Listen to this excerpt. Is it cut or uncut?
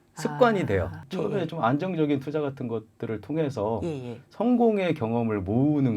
cut